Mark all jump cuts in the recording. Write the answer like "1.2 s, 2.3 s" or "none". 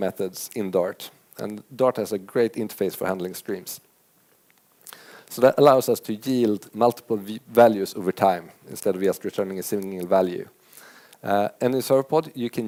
none